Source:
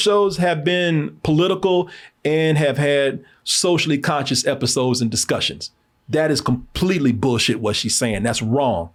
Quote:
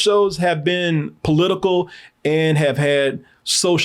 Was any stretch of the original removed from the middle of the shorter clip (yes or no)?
no